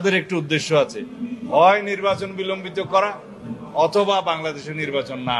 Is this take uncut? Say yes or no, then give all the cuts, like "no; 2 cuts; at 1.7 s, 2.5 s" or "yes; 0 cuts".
yes; 0 cuts